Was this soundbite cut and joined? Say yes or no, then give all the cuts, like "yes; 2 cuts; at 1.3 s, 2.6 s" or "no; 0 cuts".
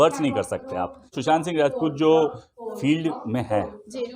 yes; 1 cut; at 1.2 s